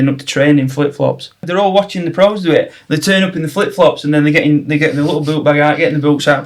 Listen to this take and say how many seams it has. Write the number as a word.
one